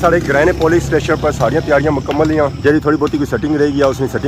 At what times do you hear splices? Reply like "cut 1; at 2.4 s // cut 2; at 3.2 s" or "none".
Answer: none

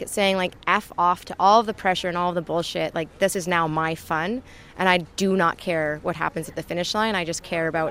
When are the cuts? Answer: none

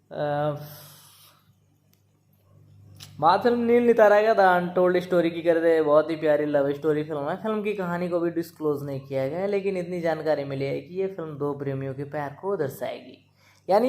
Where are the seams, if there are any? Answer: cut 1; at 2.6 s

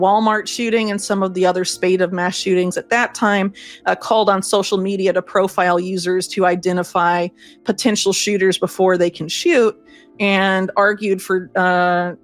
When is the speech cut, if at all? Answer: none

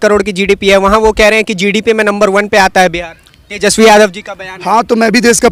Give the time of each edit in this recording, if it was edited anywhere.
none

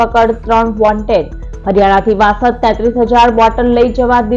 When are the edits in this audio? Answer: none

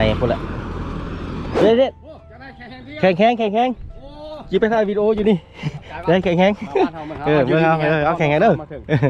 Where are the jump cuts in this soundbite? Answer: cut 1; at 1.5 s

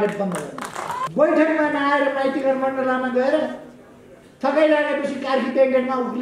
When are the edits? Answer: cut 1; at 1.1 s

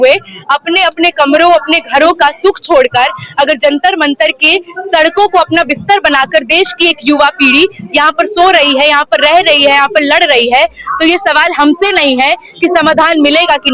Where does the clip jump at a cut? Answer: none

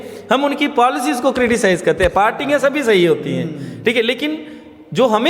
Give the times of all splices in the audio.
none

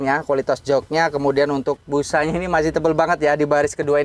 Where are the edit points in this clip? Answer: none

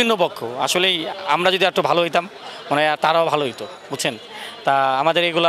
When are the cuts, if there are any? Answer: none

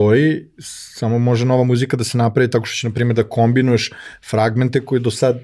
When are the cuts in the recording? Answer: none

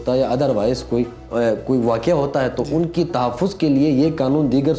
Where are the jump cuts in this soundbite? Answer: cut 1; at 1.2 s

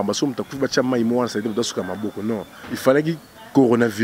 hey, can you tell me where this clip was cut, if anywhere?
cut 1; at 2.5 s

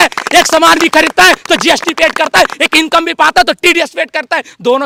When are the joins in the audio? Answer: none

